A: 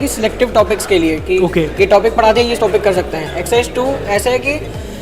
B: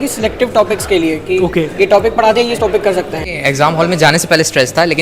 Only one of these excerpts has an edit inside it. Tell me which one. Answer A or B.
B